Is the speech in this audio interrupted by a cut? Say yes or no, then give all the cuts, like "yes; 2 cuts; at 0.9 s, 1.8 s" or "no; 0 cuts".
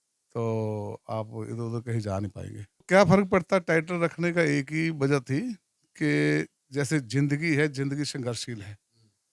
yes; 1 cut; at 2.8 s